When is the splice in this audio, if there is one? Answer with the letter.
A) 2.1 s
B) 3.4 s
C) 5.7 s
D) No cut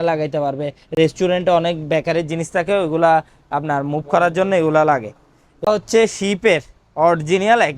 C